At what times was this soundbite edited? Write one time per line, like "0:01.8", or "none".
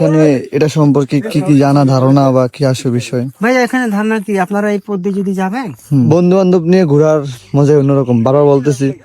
0:06.1